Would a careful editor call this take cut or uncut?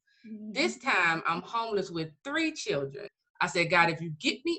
cut